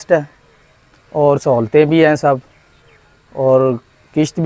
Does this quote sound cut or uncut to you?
uncut